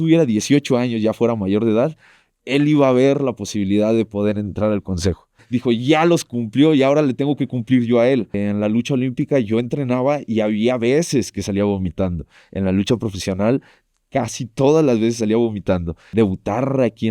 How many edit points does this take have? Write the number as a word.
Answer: three